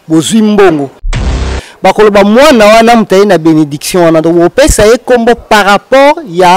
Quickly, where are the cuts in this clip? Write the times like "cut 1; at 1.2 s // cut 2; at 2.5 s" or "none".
cut 1; at 1.2 s